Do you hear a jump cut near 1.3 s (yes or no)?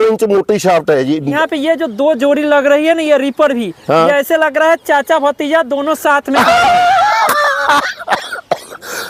yes